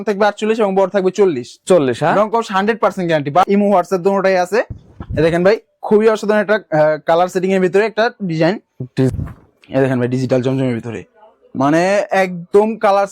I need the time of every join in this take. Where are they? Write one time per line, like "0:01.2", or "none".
0:03.4
0:09.1